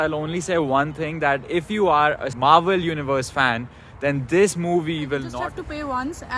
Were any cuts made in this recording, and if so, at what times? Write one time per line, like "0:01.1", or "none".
0:02.3
0:05.3